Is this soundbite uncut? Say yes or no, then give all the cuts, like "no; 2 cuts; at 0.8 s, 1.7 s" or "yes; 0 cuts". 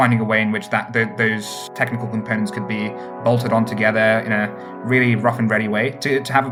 yes; 0 cuts